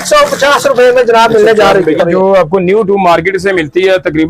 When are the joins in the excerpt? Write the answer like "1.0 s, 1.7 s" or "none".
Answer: 2.0 s